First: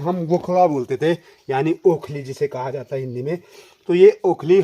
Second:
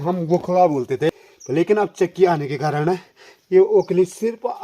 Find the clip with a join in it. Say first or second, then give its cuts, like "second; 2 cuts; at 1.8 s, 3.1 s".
second; 1 cut; at 1.3 s